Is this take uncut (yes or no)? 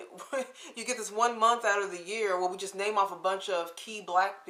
yes